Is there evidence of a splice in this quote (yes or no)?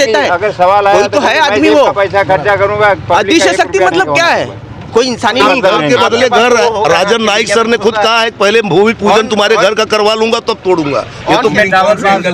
yes